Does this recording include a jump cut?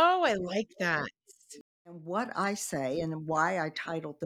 yes; 1 cut; at 2.0 s

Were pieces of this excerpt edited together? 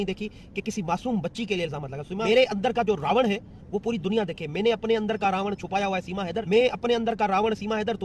yes; 2 cuts; at 2.2 s, 6.4 s

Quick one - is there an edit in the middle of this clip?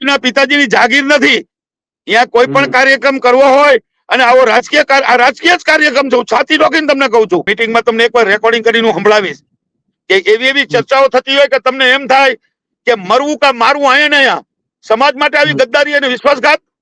yes; 1 cut; at 7.5 s

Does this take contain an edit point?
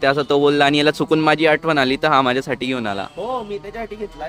no; 0 cuts

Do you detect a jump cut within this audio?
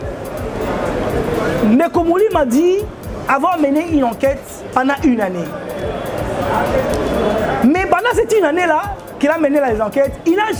no; 0 cuts

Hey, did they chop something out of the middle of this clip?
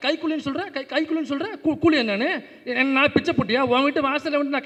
no; 0 cuts

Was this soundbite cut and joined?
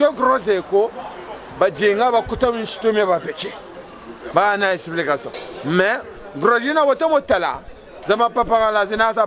no; 0 cuts

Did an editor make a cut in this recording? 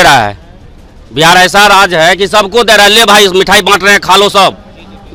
no; 0 cuts

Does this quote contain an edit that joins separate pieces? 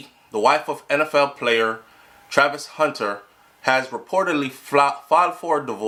no; 0 cuts

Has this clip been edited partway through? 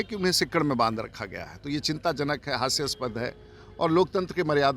no; 0 cuts

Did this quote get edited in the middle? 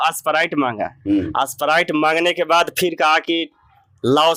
no; 0 cuts

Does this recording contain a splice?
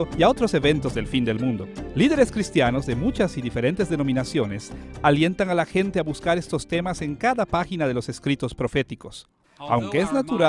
yes; 1 cut; at 7.8 s

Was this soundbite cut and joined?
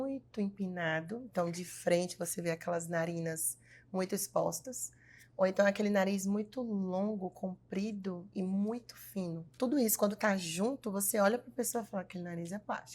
yes; 1 cut; at 9.5 s

